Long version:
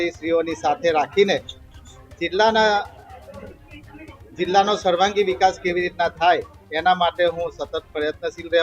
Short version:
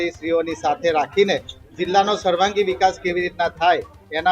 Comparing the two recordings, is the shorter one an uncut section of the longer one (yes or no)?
no